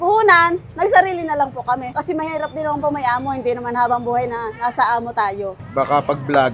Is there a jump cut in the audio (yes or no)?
yes